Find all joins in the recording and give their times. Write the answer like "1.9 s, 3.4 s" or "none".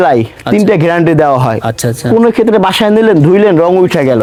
none

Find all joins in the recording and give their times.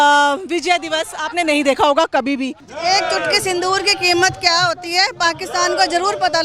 2.7 s

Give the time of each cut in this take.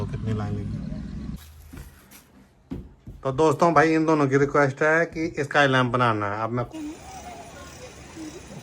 1.4 s, 6.7 s

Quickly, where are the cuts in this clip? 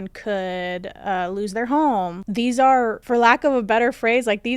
2.2 s, 3.0 s

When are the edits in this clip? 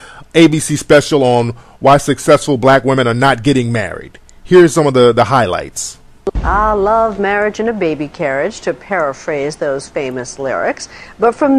5.0 s

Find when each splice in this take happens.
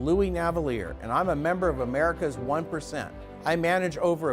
3.2 s

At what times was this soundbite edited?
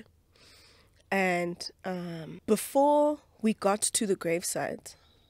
2.3 s

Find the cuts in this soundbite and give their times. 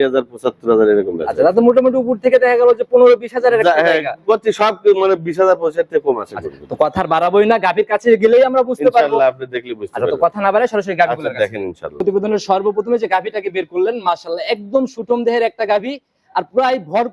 none

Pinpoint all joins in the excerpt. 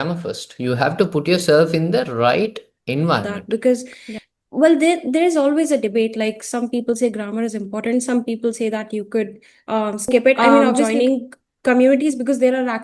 3.2 s, 3.9 s, 10.9 s

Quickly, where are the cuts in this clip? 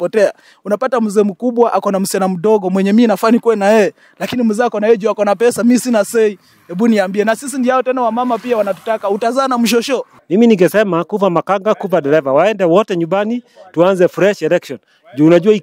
10.1 s

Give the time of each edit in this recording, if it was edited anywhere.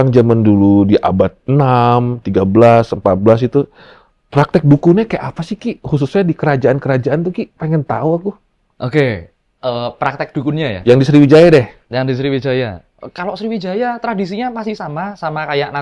none

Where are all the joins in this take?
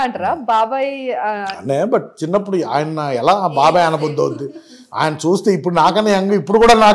none

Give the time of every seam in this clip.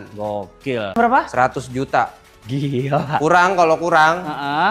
1.0 s

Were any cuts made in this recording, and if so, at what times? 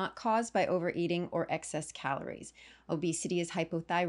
none

